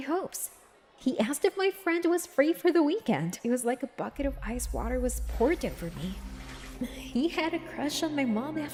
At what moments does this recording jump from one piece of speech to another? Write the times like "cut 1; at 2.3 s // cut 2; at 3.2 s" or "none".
none